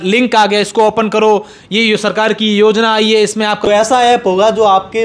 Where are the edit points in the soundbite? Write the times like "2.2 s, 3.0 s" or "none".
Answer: 3.7 s

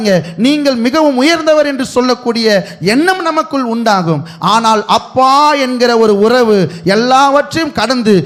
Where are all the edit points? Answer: none

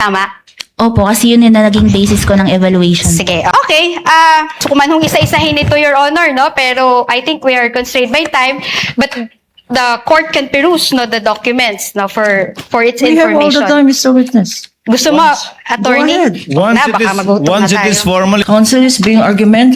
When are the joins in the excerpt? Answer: 3.5 s, 4.6 s, 18.4 s

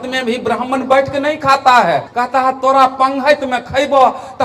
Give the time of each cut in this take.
2.1 s

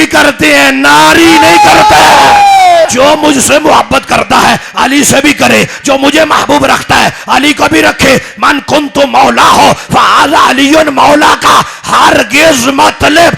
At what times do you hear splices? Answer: 2.8 s

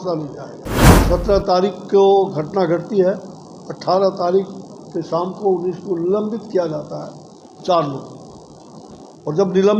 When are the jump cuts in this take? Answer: 0.9 s

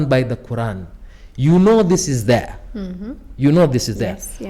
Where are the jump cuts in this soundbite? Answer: none

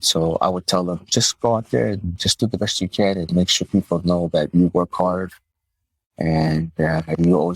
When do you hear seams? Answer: none

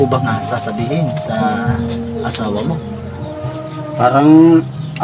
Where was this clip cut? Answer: none

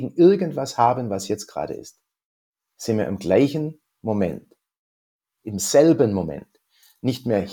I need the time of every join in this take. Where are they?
none

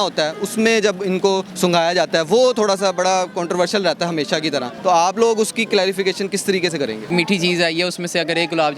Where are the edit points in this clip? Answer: 4.7 s, 7.1 s

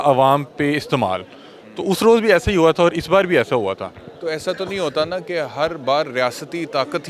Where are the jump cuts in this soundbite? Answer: none

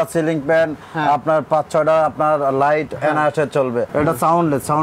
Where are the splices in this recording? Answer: 3.9 s

